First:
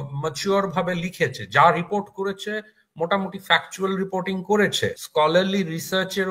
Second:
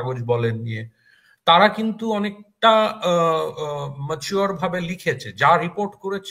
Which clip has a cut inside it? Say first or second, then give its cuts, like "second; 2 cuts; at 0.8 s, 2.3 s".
first; 1 cut; at 5.0 s